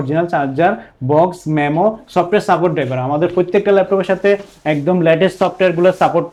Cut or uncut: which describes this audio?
uncut